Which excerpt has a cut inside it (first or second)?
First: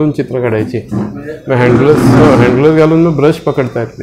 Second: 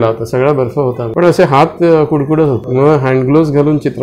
second